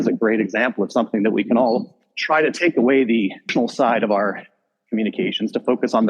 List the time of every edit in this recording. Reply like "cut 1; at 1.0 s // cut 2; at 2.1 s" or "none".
cut 1; at 3.5 s